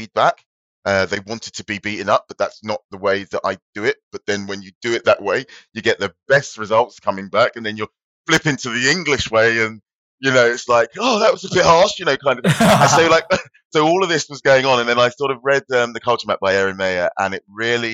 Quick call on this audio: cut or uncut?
uncut